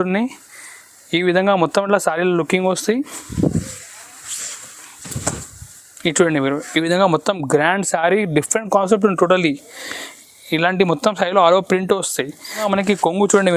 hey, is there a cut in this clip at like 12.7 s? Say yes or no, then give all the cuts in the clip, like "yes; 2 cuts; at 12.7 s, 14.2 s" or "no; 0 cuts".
yes; 1 cut; at 12.7 s